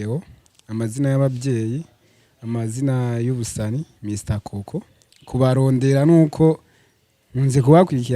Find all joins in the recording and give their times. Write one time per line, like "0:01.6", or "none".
none